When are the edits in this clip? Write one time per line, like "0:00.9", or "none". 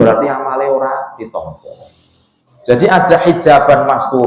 0:02.4